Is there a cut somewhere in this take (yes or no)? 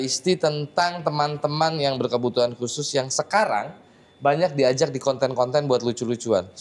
no